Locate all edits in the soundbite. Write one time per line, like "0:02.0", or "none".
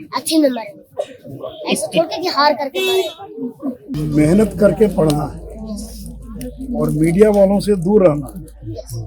0:03.9